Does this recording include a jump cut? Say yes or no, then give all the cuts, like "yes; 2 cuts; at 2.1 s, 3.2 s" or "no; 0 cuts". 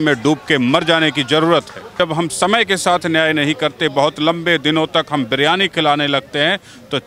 yes; 1 cut; at 1.9 s